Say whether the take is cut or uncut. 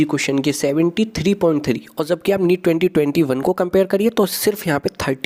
uncut